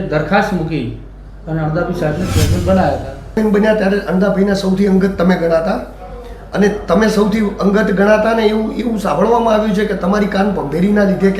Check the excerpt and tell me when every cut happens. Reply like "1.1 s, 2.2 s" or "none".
3.4 s